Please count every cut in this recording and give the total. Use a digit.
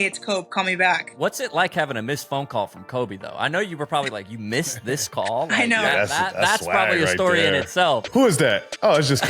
2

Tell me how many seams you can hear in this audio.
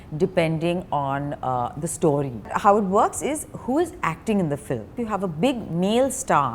2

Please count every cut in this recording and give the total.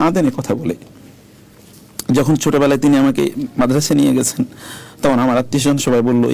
0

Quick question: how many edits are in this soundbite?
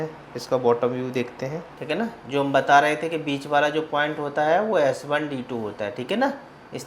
1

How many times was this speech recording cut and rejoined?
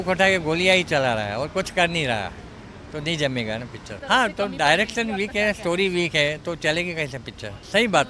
0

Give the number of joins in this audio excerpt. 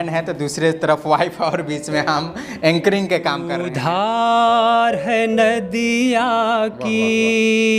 1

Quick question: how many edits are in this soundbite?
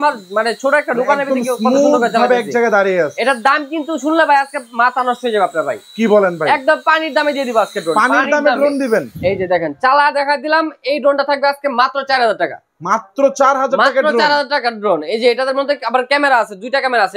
0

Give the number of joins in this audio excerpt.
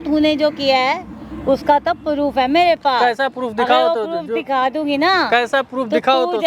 0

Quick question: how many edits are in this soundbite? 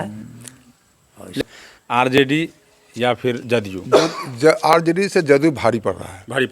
1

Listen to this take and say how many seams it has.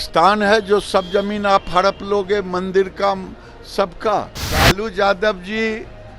1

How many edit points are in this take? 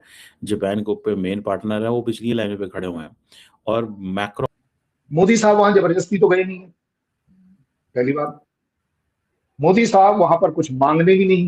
1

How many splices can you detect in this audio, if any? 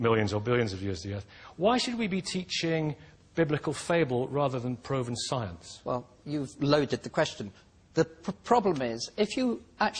1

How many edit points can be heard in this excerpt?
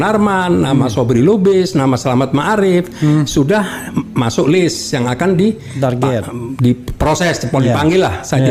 0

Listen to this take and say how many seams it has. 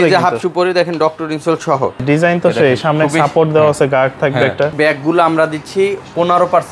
2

